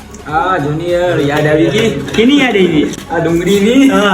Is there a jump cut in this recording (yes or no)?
no